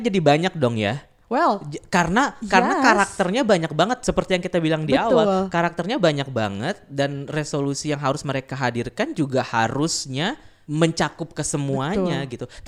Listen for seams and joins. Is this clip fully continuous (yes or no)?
yes